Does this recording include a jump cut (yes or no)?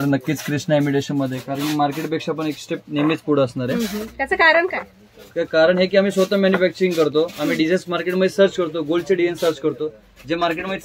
no